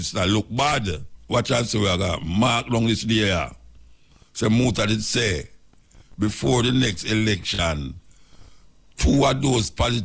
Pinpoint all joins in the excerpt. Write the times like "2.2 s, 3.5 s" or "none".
1.1 s